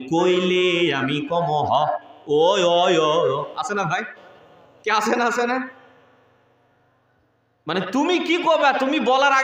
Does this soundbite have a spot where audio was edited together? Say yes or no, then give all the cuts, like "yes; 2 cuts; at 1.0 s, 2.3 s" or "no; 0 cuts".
no; 0 cuts